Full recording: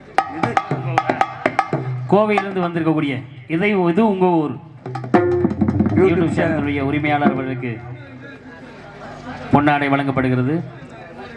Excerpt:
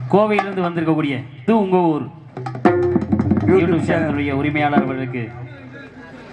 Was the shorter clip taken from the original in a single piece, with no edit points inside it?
no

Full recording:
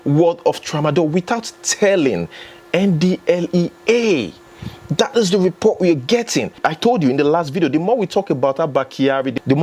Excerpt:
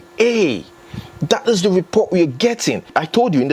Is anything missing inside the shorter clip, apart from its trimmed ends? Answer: no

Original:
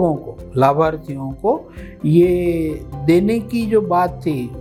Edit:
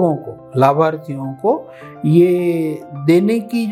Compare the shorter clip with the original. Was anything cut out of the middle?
no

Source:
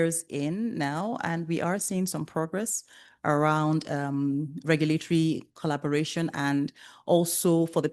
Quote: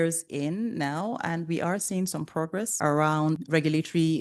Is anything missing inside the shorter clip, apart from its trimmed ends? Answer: yes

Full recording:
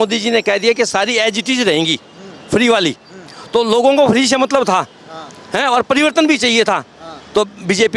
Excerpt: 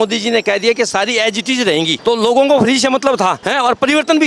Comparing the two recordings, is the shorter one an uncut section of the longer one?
no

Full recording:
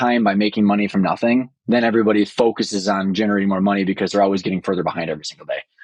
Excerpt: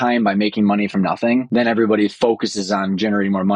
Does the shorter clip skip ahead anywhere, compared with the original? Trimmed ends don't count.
yes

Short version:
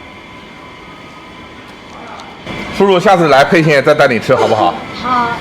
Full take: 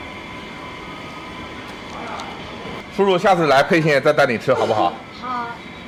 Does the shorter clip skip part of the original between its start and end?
yes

